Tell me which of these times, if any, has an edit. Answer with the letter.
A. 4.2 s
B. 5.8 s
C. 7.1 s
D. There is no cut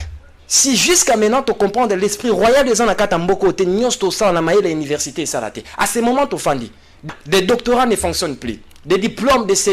C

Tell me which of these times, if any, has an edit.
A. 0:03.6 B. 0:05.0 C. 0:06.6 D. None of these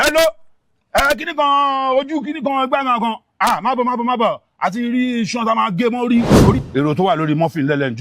C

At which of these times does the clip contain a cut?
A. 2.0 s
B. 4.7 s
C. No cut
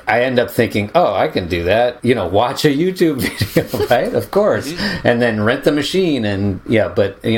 A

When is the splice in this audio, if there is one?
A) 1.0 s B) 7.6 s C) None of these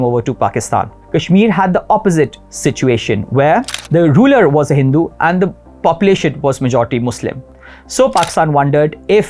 A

